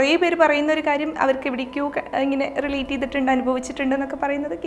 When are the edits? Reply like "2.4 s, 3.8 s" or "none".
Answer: none